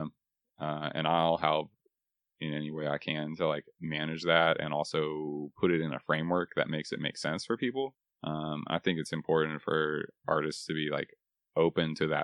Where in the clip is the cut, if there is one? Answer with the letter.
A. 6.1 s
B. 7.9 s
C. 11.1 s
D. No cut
B